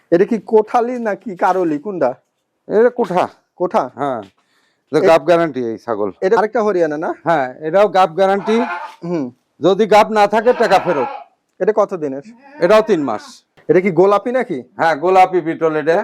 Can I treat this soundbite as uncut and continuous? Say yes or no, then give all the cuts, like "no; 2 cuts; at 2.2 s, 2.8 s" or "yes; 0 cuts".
no; 2 cuts; at 6.4 s, 13.5 s